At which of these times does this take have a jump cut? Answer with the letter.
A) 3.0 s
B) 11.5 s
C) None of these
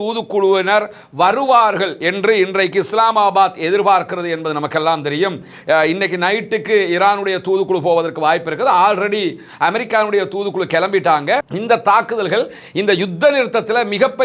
B